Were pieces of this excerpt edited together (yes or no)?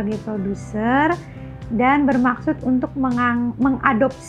no